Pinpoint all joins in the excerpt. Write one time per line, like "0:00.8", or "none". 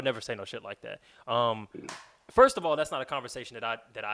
none